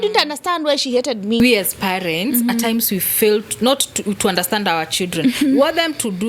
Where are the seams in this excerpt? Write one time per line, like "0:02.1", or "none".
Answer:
0:01.4